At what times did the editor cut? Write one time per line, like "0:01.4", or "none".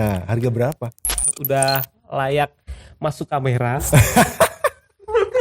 0:01.3